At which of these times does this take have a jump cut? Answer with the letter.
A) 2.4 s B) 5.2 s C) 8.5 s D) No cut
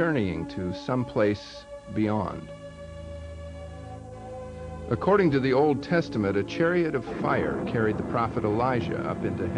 D